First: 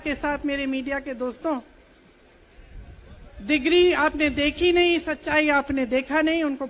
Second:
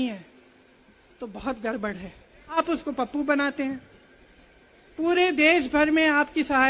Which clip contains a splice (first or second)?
second